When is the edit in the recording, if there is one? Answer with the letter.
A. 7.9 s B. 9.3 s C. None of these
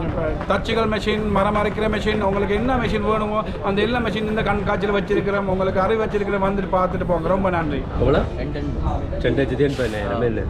A